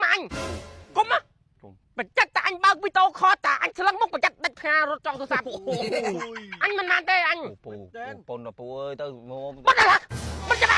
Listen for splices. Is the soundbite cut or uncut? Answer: uncut